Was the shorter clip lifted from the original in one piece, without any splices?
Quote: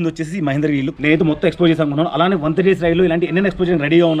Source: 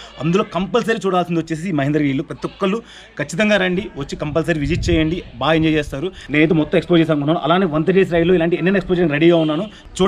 no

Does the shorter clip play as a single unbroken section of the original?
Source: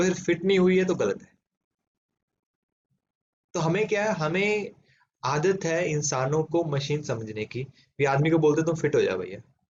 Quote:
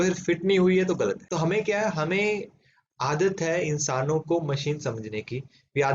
no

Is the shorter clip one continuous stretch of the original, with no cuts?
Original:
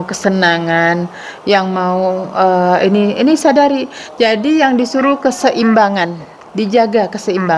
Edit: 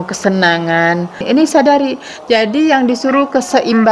no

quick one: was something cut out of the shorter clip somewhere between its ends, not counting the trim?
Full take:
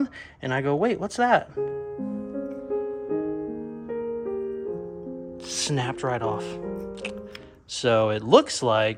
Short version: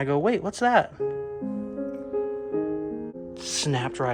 yes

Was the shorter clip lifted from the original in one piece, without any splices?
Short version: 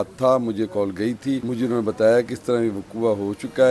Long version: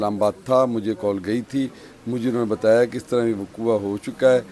no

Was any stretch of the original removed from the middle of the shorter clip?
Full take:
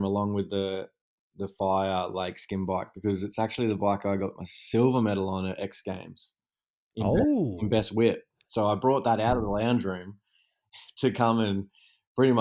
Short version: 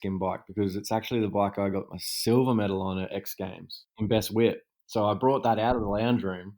yes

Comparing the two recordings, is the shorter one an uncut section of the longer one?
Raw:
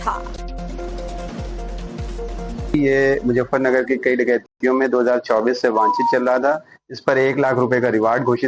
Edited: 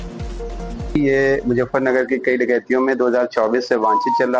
no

